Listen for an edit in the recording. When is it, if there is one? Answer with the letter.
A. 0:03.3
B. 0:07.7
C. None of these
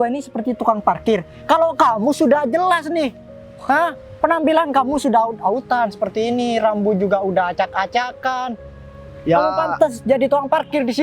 C